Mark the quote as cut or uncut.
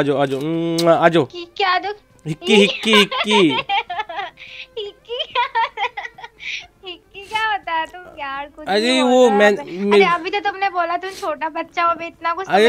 uncut